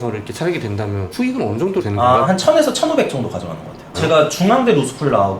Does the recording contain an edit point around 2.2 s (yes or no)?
yes